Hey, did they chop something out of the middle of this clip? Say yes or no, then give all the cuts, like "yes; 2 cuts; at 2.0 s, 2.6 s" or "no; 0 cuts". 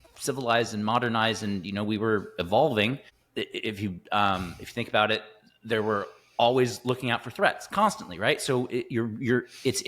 yes; 1 cut; at 3.2 s